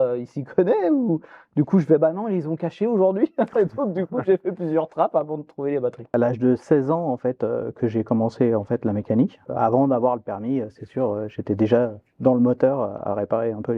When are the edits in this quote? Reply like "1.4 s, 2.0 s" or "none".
6.1 s, 9.4 s